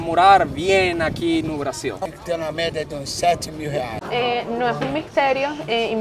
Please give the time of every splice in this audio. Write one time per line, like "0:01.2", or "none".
0:02.1
0:04.0